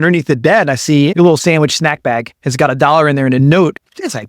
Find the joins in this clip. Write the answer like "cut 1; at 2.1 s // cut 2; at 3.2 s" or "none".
cut 1; at 1.1 s // cut 2; at 2.4 s // cut 3; at 3.4 s